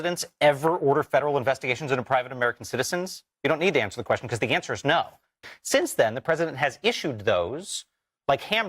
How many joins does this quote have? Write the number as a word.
one